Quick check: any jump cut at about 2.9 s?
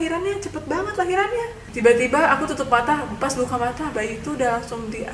no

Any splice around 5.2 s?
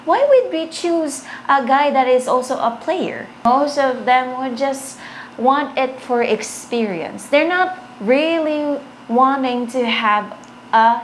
no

